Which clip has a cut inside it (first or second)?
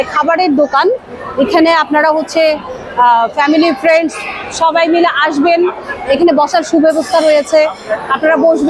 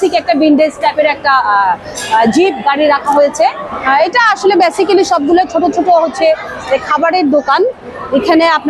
second